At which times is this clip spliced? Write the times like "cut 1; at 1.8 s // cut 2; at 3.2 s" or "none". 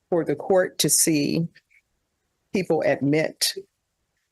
none

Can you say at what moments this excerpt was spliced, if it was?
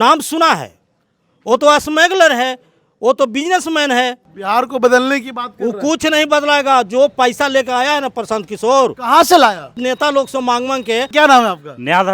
cut 1; at 4.3 s // cut 2; at 9.8 s // cut 3; at 11.1 s

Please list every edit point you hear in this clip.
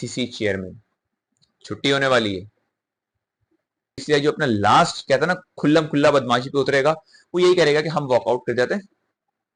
cut 1; at 4.0 s

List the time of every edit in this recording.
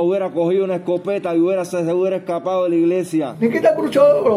cut 1; at 3.3 s

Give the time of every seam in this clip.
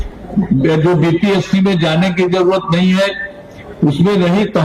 none

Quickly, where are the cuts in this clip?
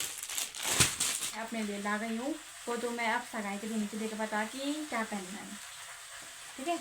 cut 1; at 1.4 s

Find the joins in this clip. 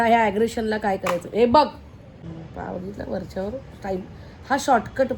cut 1; at 2.1 s

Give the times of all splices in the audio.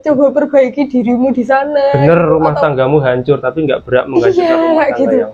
none

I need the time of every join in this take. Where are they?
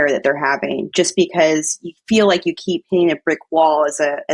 none

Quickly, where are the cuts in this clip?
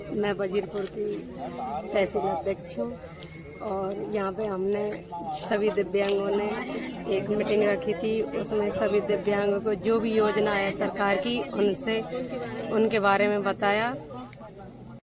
none

